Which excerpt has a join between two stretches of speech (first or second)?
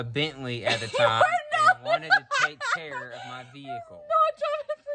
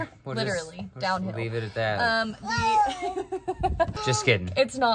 second